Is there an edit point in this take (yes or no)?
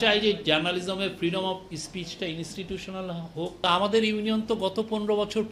yes